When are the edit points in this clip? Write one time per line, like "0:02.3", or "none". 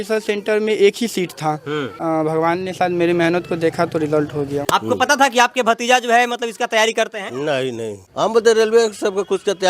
0:01.9
0:04.6
0:08.0

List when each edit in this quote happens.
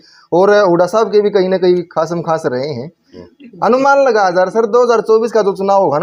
none

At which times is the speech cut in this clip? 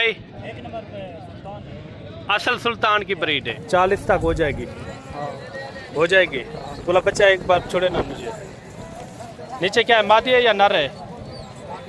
0:03.5

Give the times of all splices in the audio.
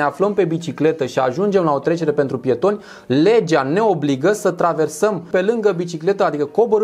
0:05.3

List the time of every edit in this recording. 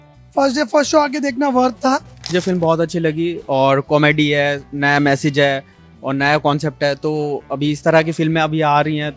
0:02.2

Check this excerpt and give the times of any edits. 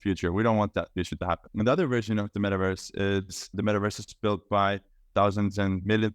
0:01.4

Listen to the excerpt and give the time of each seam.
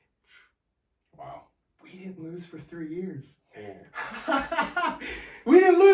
none

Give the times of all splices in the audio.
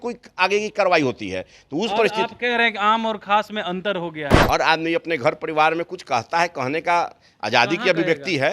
0:04.3

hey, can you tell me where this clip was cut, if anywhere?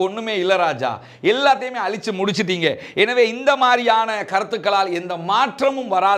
none

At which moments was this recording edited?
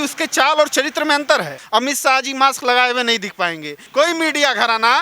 0:01.6
0:03.8

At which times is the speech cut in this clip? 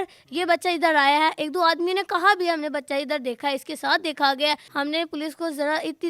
0:04.7

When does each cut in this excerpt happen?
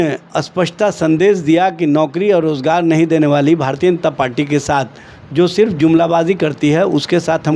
none

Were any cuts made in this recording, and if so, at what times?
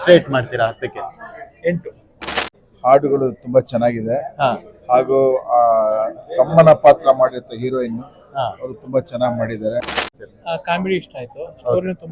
0:02.5
0:10.1

